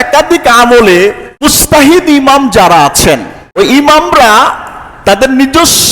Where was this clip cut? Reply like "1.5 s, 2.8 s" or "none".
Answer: 1.5 s, 3.4 s